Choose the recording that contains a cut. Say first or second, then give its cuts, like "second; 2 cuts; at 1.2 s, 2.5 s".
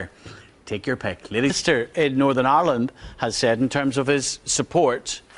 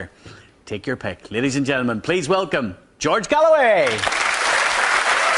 second; 1 cut; at 1.5 s